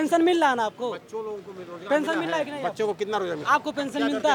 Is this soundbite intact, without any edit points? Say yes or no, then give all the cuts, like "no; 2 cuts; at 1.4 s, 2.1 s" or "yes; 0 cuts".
yes; 0 cuts